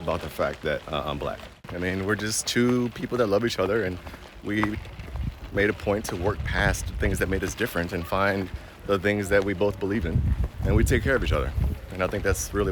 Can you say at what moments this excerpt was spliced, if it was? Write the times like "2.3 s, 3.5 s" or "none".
1.5 s